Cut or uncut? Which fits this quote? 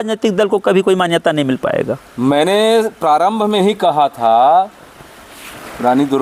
uncut